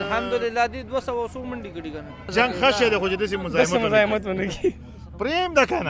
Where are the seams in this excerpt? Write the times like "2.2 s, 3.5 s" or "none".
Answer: 2.3 s